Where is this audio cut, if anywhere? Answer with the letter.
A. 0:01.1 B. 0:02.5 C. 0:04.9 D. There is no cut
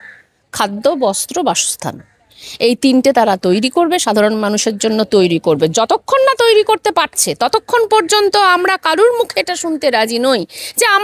D